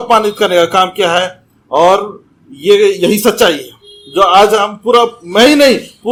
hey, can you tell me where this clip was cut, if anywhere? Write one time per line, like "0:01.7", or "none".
none